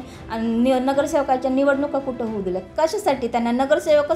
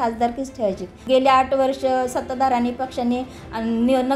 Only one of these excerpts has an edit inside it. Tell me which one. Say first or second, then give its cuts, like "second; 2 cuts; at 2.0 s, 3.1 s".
second; 1 cut; at 1.0 s